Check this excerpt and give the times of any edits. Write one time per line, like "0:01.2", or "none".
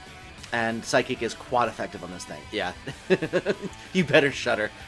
none